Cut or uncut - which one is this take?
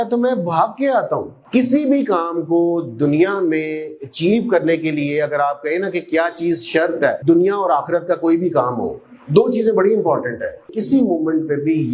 cut